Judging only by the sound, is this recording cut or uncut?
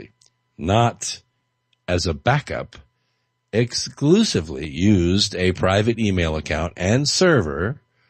cut